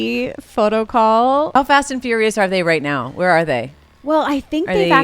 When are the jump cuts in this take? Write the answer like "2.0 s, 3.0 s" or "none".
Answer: 1.5 s